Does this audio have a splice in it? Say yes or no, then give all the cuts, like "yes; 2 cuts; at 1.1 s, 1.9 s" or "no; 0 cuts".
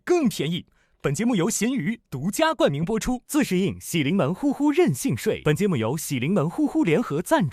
yes; 1 cut; at 5.4 s